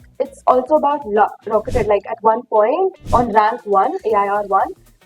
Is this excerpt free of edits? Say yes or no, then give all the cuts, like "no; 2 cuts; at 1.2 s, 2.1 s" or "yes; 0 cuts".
no; 1 cut; at 1.4 s